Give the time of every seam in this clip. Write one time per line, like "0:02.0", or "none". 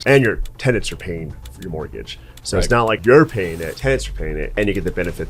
0:03.0
0:03.8
0:04.5